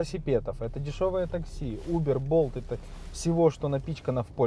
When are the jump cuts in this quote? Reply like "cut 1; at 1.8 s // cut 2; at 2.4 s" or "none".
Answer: none